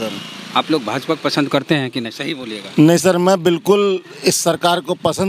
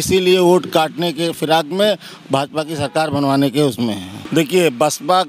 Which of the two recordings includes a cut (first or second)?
second